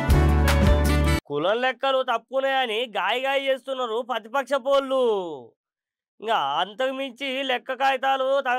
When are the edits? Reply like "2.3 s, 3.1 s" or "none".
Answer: 1.2 s